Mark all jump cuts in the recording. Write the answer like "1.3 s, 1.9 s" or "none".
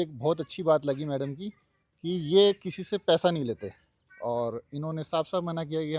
none